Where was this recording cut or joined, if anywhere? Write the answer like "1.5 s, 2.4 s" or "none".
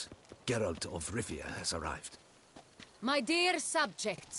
none